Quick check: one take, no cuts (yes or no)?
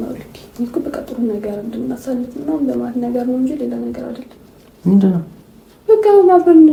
yes